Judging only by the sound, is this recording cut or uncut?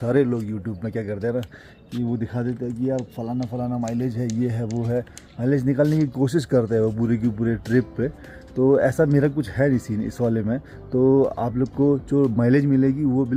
uncut